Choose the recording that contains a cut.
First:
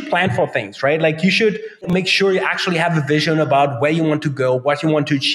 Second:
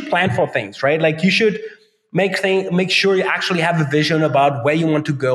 first; 1 cut; at 1.8 s

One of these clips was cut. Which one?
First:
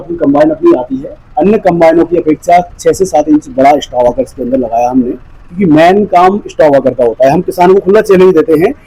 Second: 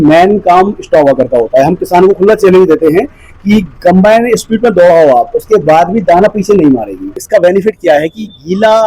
second; 1 cut; at 7.1 s

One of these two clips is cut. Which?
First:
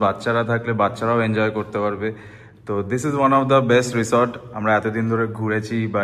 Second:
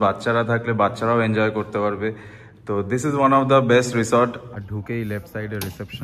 second; 1 cut; at 4.5 s

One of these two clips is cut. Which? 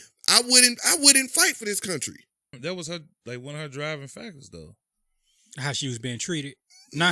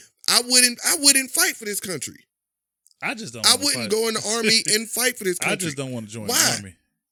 first; 1 cut; at 2.5 s

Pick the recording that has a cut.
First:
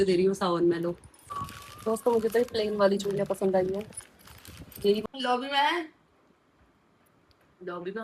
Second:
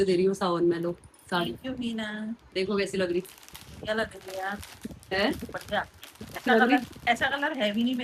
first; 2 cuts; at 1.3 s, 5.0 s

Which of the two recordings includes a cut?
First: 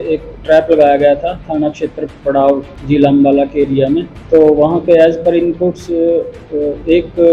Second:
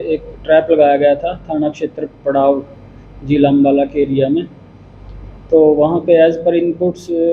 first; 2 cuts; at 2.7 s, 4.1 s

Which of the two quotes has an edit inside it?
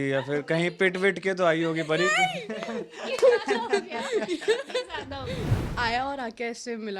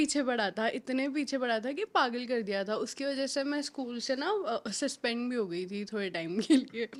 first; 1 cut; at 5.8 s

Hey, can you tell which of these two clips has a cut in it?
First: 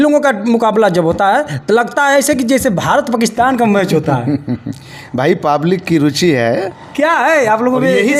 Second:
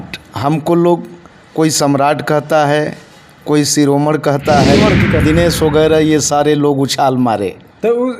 second; 1 cut; at 5.2 s

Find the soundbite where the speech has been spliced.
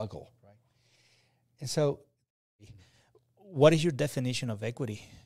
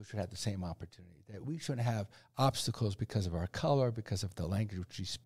first; 1 cut; at 2.5 s

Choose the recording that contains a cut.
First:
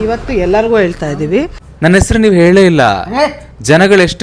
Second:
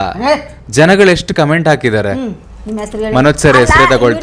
first; 1 cut; at 1.5 s

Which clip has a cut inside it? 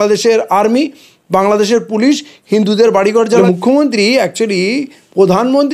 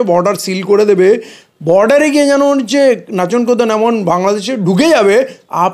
first; 1 cut; at 3.4 s

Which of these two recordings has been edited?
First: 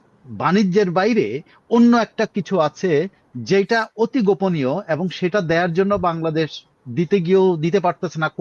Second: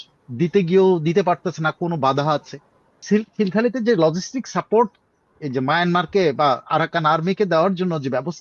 second; 1 cut; at 3.0 s

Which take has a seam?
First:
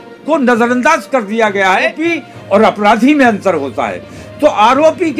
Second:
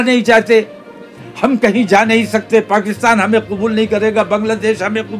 first; 1 cut; at 2.0 s

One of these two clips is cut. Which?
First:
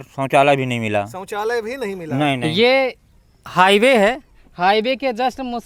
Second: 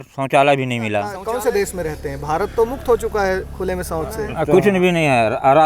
second; 2 cuts; at 1.2 s, 4.2 s

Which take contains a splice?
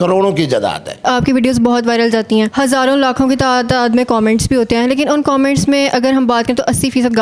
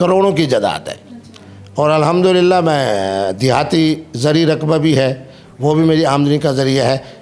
first; 2 cuts; at 0.9 s, 2.5 s

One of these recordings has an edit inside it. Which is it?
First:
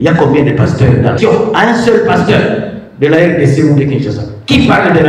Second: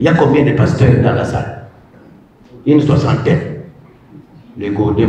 first; 1 cut; at 1.2 s

